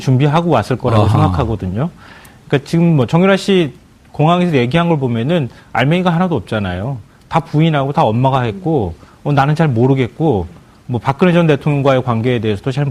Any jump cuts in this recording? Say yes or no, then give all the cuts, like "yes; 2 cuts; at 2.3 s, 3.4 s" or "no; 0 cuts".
yes; 1 cut; at 5.7 s